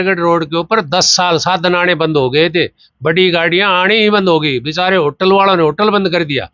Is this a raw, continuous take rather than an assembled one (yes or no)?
yes